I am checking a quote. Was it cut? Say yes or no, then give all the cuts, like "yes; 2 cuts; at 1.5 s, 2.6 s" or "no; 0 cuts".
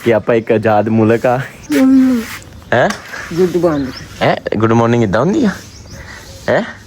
yes; 1 cut; at 1.5 s